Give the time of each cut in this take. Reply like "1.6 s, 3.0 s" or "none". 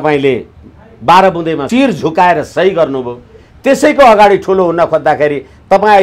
1.6 s